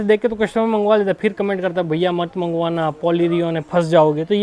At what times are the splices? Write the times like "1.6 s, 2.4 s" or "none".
none